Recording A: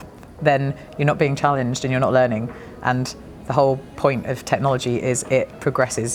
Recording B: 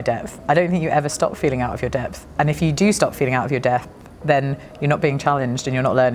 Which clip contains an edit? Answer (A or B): B